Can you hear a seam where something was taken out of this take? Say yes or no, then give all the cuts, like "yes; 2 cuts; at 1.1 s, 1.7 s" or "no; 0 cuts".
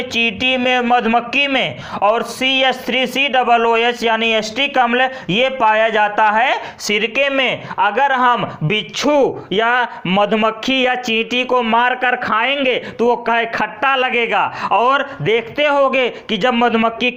no; 0 cuts